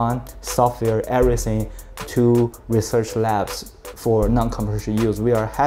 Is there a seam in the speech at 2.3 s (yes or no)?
no